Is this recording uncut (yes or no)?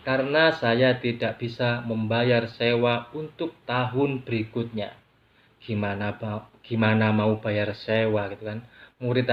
yes